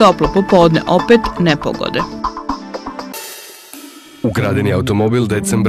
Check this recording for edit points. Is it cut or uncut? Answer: cut